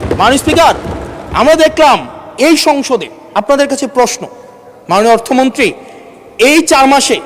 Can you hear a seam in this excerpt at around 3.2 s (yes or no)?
yes